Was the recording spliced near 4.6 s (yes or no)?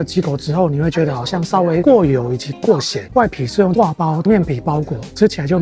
no